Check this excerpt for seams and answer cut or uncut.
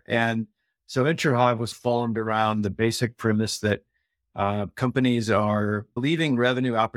uncut